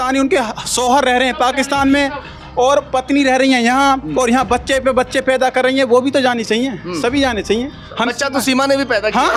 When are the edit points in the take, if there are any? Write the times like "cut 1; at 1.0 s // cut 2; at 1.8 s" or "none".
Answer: none